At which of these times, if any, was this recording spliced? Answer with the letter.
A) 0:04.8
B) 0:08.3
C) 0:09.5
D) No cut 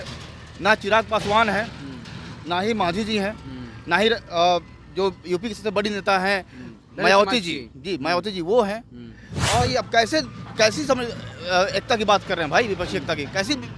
C